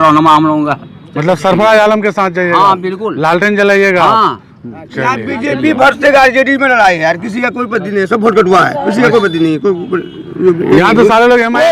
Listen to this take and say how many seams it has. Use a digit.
0